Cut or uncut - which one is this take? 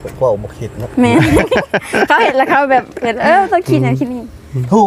uncut